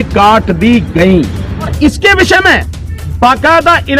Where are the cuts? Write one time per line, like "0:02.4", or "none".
0:01.7